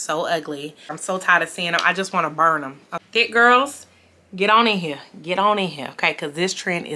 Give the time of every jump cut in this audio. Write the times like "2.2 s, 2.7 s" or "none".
1.0 s, 2.9 s